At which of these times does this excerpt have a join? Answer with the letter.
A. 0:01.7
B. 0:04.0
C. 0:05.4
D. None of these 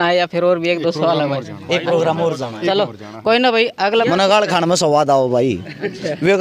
B